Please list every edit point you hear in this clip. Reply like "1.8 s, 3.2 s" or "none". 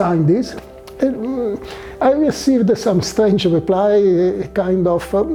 none